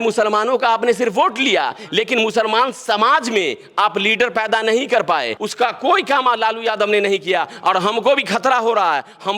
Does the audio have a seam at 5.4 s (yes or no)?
yes